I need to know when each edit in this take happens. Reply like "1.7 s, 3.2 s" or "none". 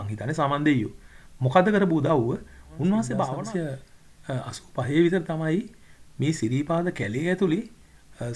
3.4 s

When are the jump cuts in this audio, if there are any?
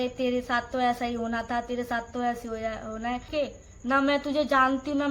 3.3 s

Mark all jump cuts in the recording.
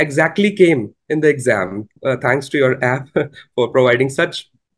1.9 s

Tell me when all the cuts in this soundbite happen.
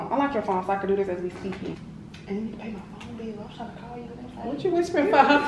1.7 s

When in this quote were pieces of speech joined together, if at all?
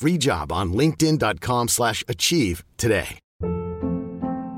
3.2 s

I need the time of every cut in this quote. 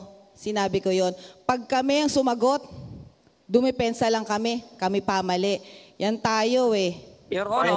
none

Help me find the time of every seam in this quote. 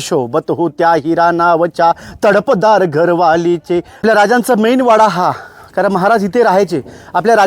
4.0 s

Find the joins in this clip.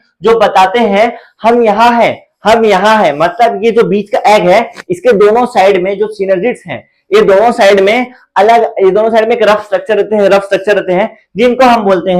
none

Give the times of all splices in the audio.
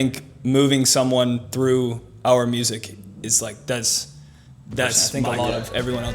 5.0 s

